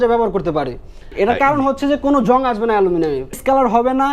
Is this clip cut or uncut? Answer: cut